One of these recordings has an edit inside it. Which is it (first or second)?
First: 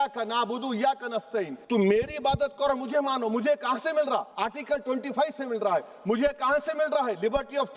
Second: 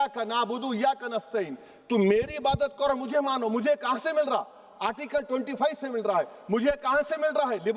first